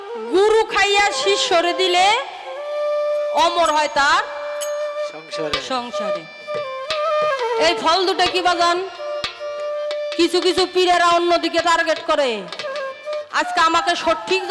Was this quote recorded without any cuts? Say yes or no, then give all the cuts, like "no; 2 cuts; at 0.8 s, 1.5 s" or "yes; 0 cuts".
yes; 0 cuts